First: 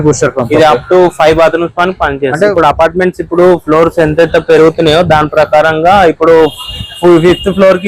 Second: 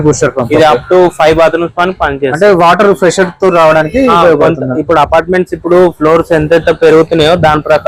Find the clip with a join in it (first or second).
first